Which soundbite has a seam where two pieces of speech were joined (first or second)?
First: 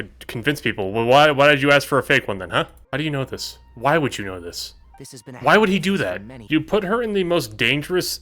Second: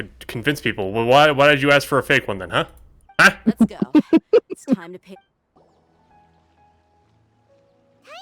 first